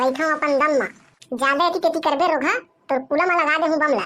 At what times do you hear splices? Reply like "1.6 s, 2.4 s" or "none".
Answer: none